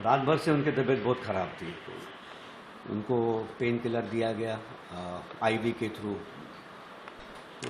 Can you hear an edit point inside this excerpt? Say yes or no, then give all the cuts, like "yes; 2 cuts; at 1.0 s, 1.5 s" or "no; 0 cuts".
yes; 1 cut; at 1.9 s